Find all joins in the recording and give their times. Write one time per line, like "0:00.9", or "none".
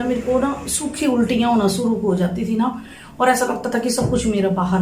none